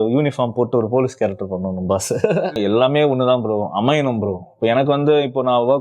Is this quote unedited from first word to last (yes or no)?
no